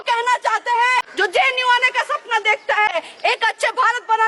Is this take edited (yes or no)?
yes